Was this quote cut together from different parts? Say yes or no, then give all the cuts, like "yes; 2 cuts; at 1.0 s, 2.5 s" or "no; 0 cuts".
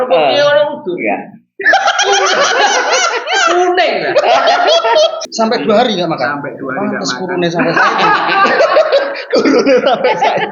yes; 1 cut; at 5.2 s